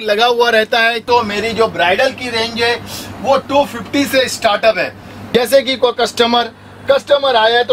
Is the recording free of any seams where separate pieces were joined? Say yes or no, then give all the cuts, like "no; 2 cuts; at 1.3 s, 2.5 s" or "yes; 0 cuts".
no; 2 cuts; at 1.0 s, 5.2 s